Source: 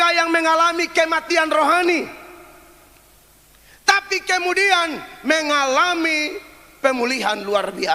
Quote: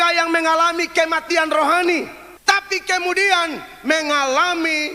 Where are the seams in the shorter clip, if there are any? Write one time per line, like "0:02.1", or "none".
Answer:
0:02.2